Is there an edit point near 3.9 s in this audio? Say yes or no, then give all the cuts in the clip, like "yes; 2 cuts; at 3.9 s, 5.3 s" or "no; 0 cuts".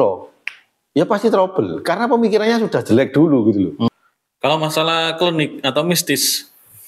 yes; 1 cut; at 3.9 s